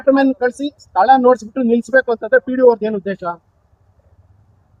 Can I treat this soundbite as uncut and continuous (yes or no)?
yes